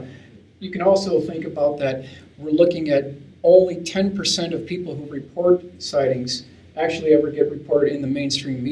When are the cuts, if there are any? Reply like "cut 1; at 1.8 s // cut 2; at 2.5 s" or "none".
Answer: cut 1; at 5.8 s

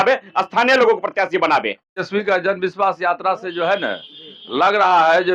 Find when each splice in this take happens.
cut 1; at 2.1 s

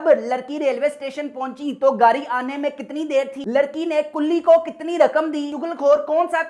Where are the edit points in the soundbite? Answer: cut 1; at 3.4 s // cut 2; at 5.6 s

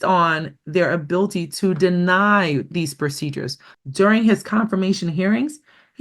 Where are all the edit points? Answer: cut 1; at 3.6 s

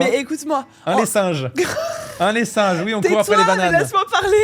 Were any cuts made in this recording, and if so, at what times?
none

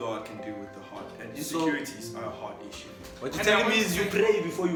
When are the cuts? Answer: none

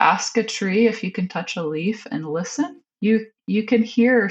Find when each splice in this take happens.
none

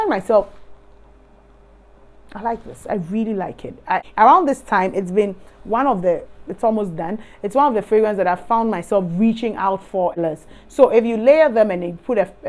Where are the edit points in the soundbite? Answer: cut 1; at 4.0 s // cut 2; at 10.2 s

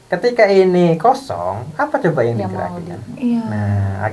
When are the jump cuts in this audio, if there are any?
none

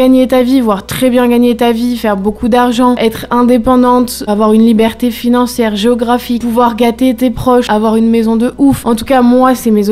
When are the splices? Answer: cut 1; at 3.0 s // cut 2; at 4.2 s // cut 3; at 6.4 s // cut 4; at 7.7 s // cut 5; at 8.8 s

